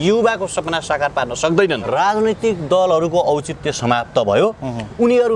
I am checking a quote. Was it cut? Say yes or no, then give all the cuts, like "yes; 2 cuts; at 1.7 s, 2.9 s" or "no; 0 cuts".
yes; 1 cut; at 1.8 s